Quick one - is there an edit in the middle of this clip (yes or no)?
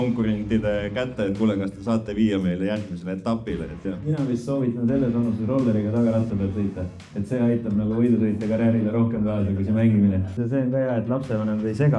yes